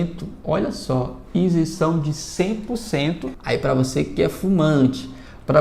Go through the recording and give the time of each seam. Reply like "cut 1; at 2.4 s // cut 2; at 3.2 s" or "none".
cut 1; at 3.4 s